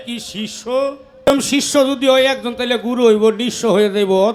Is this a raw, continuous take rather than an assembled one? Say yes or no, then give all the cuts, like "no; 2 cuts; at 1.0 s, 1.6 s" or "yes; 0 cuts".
no; 1 cut; at 1.3 s